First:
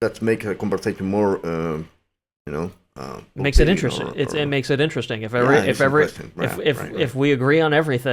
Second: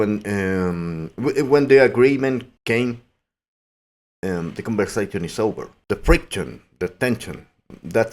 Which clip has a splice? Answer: second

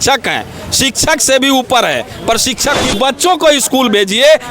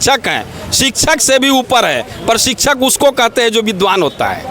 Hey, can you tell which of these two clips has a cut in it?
first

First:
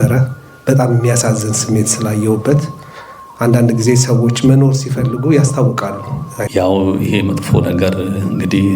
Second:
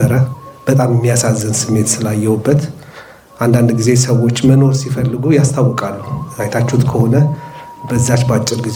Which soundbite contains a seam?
first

